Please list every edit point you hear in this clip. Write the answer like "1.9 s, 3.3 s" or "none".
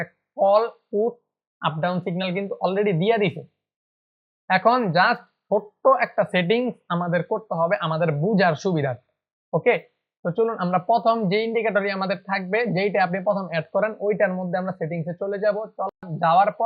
none